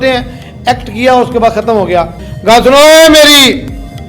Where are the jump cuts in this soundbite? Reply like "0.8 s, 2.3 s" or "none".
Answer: 2.2 s

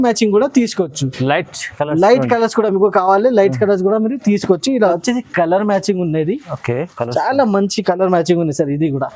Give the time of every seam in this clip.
5.0 s

